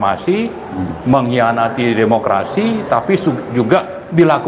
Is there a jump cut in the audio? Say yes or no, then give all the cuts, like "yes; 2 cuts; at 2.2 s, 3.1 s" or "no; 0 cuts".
no; 0 cuts